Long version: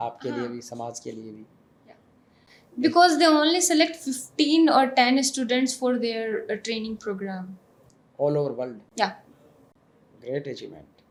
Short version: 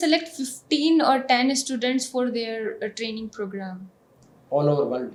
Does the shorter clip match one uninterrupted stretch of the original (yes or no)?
yes